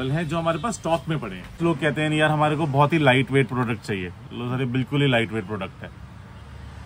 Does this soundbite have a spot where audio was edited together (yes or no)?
yes